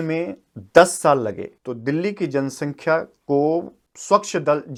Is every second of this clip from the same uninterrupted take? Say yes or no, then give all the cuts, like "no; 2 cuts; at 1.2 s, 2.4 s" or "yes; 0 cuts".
yes; 0 cuts